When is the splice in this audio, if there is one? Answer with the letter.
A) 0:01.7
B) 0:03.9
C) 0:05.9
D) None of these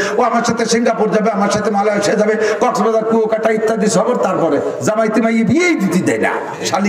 D